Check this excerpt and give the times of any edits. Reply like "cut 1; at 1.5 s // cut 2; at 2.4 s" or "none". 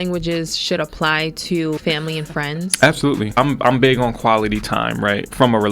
cut 1; at 1.8 s // cut 2; at 3.4 s